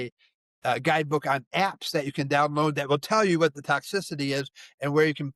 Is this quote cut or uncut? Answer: uncut